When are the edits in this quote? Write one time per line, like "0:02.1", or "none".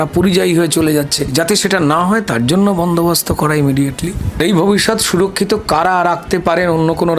0:01.2
0:04.4